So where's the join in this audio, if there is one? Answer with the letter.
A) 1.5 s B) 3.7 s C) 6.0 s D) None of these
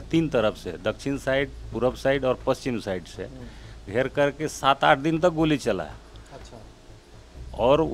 D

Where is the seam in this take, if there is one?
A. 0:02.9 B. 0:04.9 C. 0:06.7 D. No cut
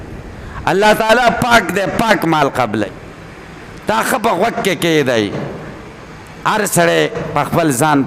A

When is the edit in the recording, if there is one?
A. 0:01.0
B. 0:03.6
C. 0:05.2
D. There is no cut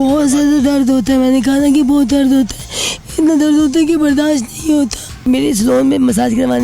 C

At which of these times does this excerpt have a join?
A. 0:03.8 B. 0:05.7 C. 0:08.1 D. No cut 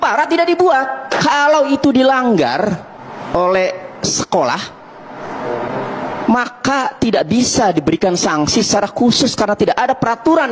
D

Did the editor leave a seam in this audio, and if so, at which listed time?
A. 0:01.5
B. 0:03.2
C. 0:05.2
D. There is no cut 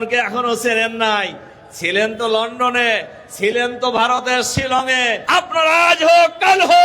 C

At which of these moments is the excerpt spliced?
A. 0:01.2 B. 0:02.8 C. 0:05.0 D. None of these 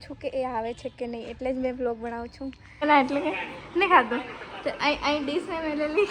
B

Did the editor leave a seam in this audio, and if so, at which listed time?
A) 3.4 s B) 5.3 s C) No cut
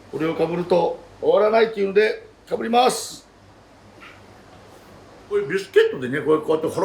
B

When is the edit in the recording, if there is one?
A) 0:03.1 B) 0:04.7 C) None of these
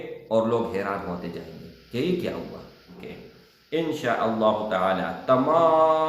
A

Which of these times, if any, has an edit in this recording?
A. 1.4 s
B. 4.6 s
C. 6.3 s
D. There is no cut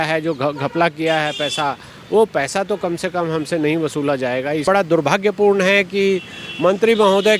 B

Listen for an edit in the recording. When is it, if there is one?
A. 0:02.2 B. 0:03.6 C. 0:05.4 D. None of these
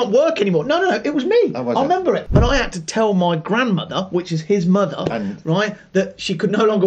A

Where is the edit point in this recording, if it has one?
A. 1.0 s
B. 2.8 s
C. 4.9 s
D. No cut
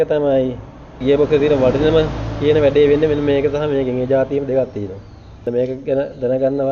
A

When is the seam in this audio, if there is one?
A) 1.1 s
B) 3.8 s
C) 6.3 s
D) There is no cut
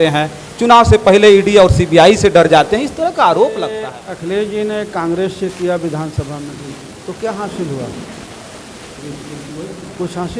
B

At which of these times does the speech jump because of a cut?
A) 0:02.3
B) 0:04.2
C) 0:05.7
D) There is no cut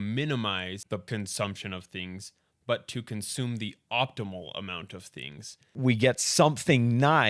C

